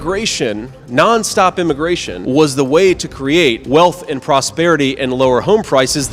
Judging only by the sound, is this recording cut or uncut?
uncut